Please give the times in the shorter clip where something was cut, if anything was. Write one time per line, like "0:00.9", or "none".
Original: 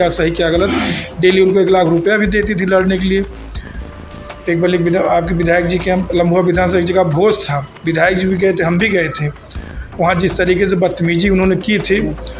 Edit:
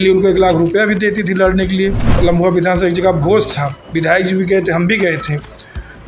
0:02.1